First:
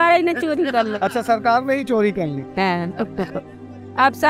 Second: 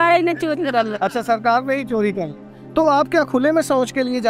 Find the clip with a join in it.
second; 1 cut; at 2.4 s

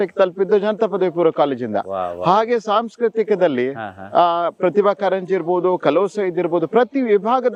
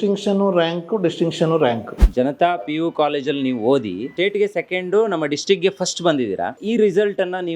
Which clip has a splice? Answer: second; 3 cuts; at 2.0 s, 4.1 s, 6.6 s

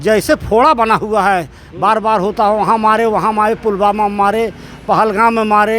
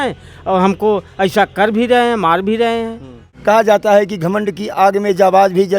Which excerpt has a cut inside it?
second; 1 cut; at 3.2 s

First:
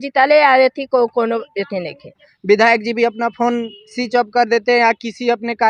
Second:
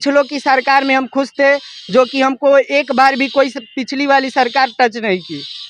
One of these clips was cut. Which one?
first; 1 cut; at 2.3 s

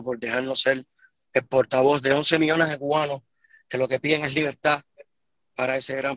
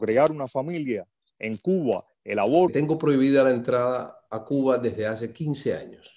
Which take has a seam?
second; 1 cut; at 2.7 s

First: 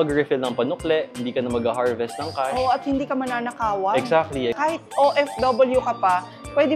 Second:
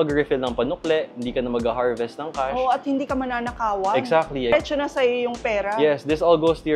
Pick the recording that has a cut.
first; 1 cut; at 4.5 s

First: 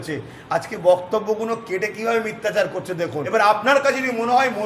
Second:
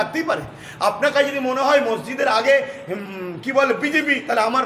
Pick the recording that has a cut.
first; 1 cut; at 3.3 s

